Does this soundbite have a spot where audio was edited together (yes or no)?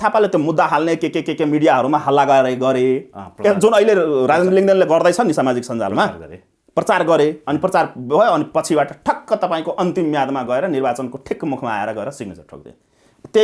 no